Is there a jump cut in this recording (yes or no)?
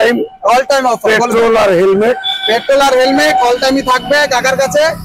no